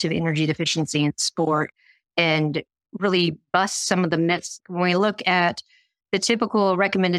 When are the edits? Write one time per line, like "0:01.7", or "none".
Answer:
0:04.6

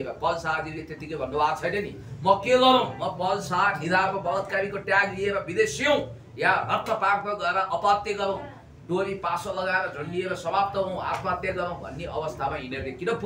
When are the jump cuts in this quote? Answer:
none

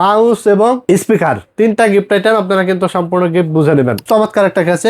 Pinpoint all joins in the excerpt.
0:04.0

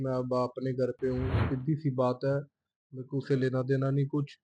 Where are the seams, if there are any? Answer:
0:01.4

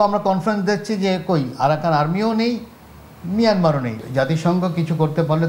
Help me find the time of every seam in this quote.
0:03.9

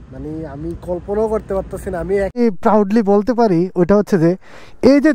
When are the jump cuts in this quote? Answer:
0:02.3

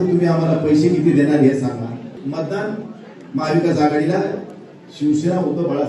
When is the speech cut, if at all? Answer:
0:02.2

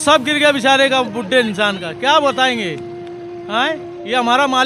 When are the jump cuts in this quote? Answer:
none

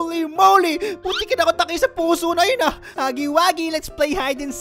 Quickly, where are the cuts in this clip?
0:02.9

